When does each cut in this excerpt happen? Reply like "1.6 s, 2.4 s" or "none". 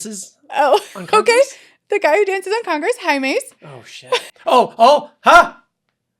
4.3 s